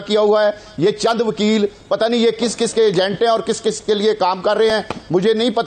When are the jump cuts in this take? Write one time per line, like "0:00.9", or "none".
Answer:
none

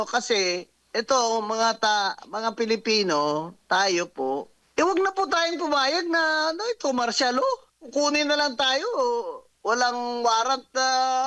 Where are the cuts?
0:04.6
0:07.7
0:09.4

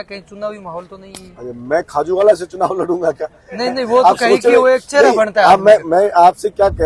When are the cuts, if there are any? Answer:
none

